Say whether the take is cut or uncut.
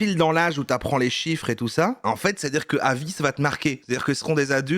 uncut